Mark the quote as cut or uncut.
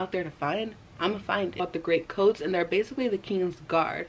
cut